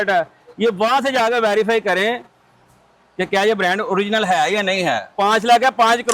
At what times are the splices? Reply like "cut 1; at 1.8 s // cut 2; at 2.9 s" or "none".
cut 1; at 5.1 s